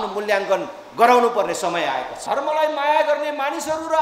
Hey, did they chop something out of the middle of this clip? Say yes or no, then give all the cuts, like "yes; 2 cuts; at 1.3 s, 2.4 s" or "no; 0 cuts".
yes; 1 cut; at 2.1 s